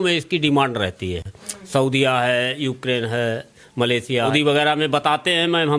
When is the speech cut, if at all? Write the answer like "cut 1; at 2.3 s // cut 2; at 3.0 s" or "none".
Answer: cut 1; at 4.3 s